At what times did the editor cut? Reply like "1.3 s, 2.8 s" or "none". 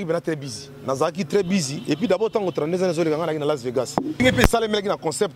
4.2 s

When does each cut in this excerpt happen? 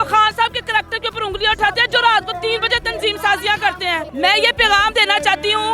4.1 s

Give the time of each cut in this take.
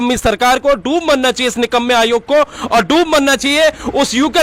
none

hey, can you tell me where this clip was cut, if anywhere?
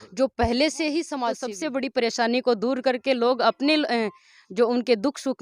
1.4 s

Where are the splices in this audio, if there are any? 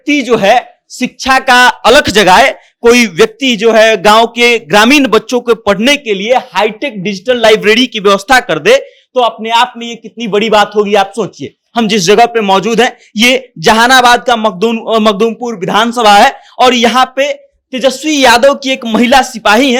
none

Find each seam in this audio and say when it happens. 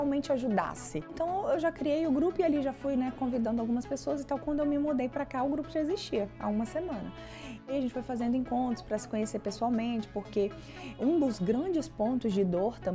1.1 s, 7.6 s

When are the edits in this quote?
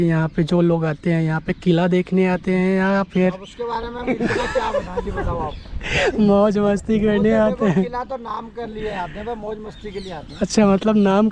none

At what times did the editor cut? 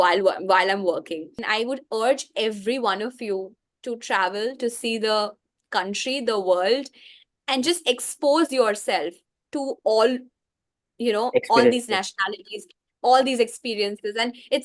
1.4 s

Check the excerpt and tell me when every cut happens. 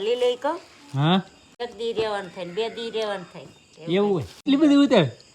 1.4 s, 4.4 s

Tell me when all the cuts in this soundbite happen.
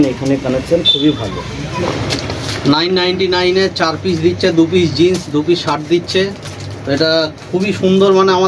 1.6 s

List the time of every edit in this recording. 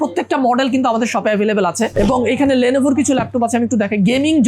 1.9 s

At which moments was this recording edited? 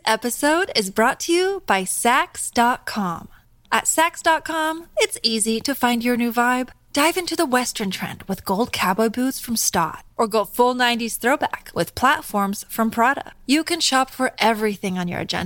none

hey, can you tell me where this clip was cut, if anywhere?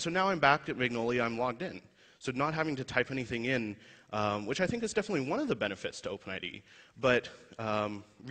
3.2 s

